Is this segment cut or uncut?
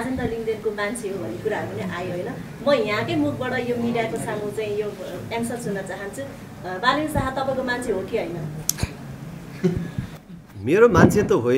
uncut